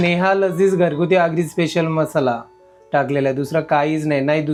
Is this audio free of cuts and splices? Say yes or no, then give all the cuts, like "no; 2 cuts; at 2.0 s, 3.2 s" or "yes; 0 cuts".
yes; 0 cuts